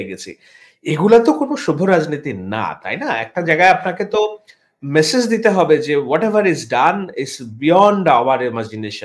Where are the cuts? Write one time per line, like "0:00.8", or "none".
none